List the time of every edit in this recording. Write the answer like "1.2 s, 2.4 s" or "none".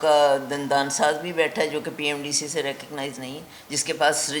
none